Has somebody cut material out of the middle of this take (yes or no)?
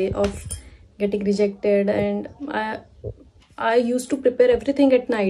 no